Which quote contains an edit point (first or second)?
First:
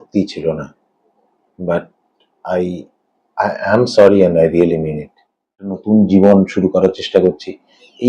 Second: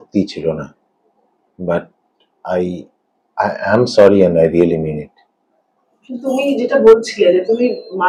first